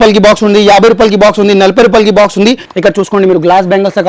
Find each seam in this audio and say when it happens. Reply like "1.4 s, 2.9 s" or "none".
2.7 s